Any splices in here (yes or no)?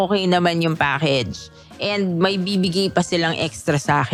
no